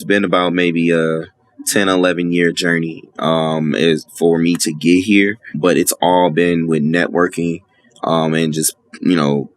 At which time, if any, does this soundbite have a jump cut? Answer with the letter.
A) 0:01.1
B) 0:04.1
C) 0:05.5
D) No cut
C